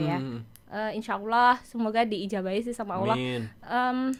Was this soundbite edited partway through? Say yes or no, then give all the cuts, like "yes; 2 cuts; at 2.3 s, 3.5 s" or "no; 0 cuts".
no; 0 cuts